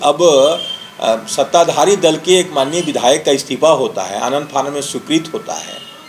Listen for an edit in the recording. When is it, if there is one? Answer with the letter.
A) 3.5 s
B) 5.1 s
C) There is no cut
C